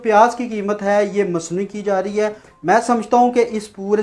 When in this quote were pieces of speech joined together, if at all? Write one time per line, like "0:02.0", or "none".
0:02.4